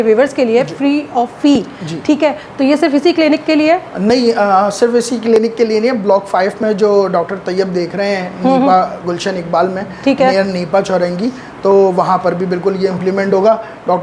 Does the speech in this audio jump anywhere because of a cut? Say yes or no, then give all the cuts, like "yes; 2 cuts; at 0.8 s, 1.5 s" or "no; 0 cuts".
no; 0 cuts